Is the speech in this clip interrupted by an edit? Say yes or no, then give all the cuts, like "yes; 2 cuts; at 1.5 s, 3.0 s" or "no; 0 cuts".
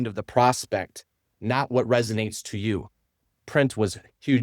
yes; 1 cut; at 3.1 s